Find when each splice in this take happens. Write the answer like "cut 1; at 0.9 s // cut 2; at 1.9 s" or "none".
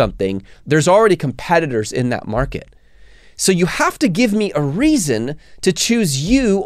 none

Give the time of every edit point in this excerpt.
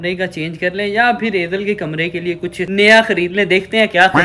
none

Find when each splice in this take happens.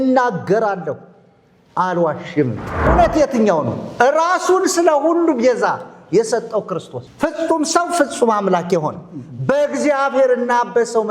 cut 1; at 2.9 s // cut 2; at 7.0 s

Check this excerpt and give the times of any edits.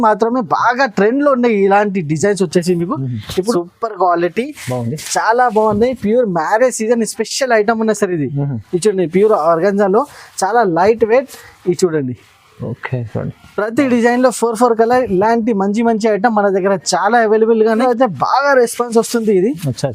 cut 1; at 3.5 s // cut 2; at 17.8 s

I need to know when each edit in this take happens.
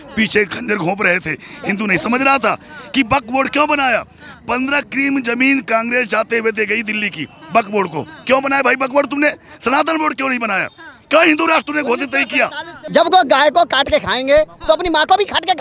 cut 1; at 12.8 s

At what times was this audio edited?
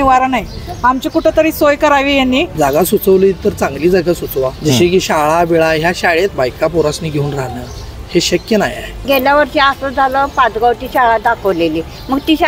cut 1; at 2.5 s // cut 2; at 4.6 s // cut 3; at 6.3 s // cut 4; at 9.0 s

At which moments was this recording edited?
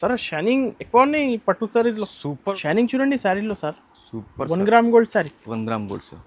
cut 1; at 2.5 s

